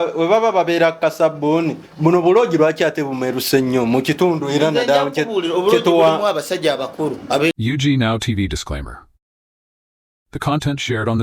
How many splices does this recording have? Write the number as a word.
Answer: one